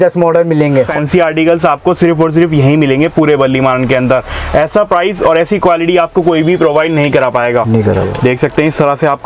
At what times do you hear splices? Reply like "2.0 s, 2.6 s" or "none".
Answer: 0.9 s